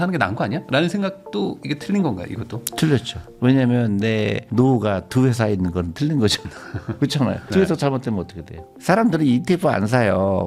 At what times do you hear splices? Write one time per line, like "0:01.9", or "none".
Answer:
0:08.7